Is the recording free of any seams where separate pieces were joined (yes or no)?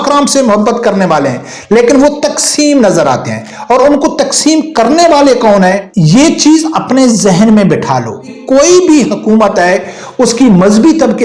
no